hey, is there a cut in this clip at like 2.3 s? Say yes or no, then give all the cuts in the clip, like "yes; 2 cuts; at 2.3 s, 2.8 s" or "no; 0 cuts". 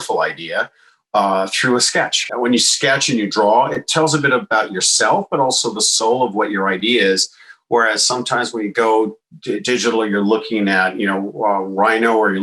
yes; 1 cut; at 2.3 s